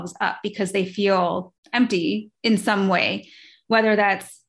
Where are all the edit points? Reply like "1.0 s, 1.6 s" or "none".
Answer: 1.6 s